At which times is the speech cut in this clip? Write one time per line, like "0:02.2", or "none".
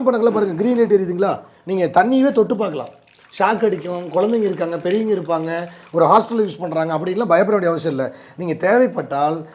none